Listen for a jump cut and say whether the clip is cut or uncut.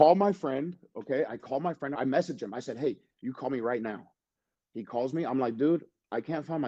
cut